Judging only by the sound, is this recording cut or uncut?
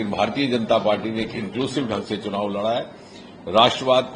uncut